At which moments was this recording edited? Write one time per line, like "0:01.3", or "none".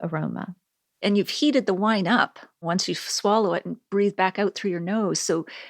0:01.0
0:02.6